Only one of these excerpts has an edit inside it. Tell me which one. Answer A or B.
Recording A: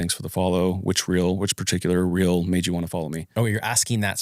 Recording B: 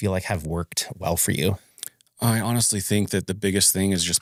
A